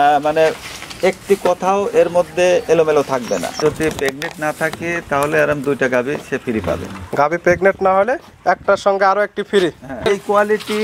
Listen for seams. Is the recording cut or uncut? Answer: cut